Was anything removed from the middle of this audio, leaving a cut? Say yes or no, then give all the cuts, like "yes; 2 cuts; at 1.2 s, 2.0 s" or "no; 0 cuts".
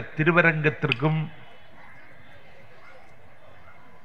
no; 0 cuts